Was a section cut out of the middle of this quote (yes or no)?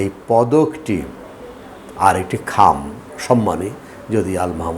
no